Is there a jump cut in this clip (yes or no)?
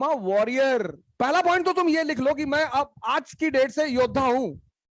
yes